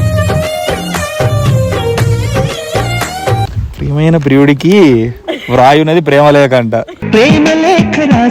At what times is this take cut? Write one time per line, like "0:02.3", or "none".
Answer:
0:03.5